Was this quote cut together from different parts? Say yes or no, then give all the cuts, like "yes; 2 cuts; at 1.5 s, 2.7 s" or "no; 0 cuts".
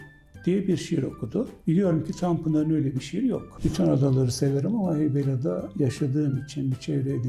yes; 1 cut; at 3.5 s